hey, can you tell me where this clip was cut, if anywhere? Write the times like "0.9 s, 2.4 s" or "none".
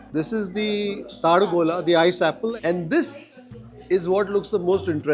2.5 s